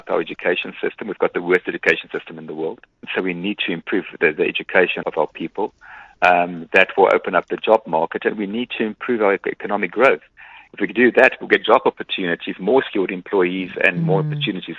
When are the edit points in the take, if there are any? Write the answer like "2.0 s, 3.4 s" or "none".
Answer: 3.0 s, 5.0 s